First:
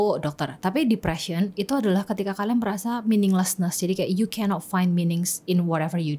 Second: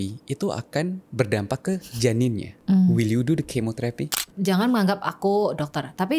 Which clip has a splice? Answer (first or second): second